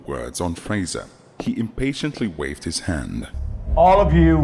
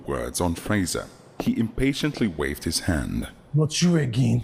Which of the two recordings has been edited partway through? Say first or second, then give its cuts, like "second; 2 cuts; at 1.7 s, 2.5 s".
first; 1 cut; at 3.4 s